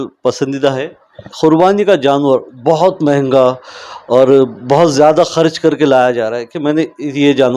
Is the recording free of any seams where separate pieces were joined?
no; 1 cut; at 1.3 s

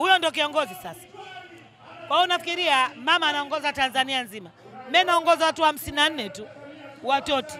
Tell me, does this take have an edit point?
no; 0 cuts

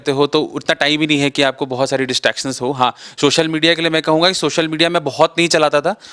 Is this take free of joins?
yes; 0 cuts

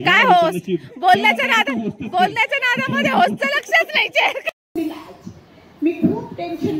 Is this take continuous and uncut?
no; 1 cut; at 4.7 s

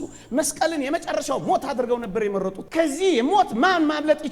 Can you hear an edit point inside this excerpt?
yes; 1 cut; at 2.6 s

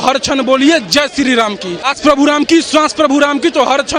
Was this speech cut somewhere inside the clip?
yes; 1 cut; at 1.9 s

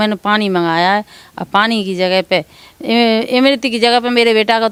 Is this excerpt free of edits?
yes; 0 cuts

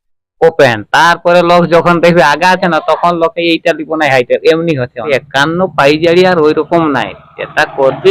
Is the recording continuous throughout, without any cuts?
no; 1 cut; at 5.1 s

